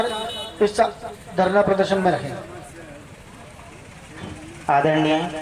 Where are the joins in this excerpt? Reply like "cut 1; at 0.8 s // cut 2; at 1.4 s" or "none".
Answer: none